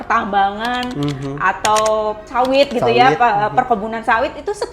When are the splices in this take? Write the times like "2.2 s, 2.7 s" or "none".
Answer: 2.2 s